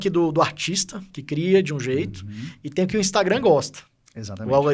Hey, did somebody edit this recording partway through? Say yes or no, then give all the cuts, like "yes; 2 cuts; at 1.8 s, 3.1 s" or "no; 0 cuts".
no; 0 cuts